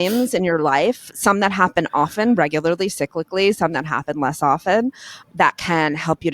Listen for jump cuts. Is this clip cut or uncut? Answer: cut